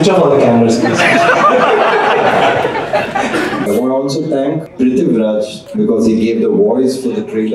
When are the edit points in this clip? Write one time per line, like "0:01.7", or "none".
0:03.7
0:04.7
0:05.6